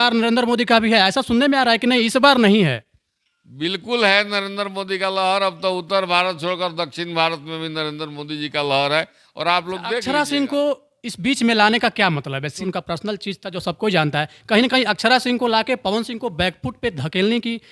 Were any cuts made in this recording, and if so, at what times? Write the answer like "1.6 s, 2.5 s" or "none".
10.0 s, 12.6 s